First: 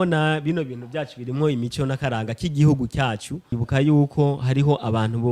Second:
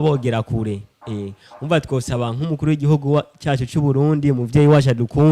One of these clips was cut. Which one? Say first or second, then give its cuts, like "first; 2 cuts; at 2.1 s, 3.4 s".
first; 1 cut; at 3.6 s